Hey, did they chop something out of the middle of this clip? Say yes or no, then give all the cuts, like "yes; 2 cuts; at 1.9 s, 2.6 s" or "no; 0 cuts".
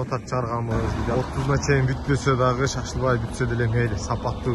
yes; 1 cut; at 1.0 s